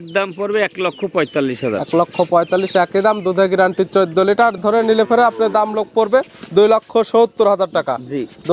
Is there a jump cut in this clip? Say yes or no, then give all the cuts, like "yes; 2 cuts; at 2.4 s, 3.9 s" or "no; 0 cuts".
yes; 1 cut; at 4.6 s